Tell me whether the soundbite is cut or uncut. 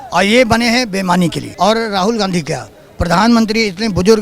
cut